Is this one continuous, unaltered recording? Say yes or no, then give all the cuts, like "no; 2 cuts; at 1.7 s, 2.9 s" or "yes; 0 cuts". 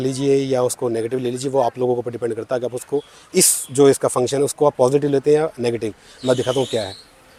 yes; 0 cuts